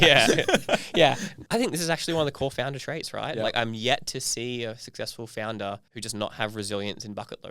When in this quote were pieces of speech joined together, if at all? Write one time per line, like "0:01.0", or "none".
0:01.3
0:05.9